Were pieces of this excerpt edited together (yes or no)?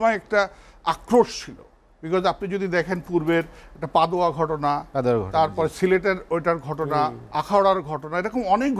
no